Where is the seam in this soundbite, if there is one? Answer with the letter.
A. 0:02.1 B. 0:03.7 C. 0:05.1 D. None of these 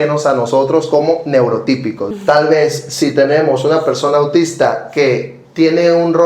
A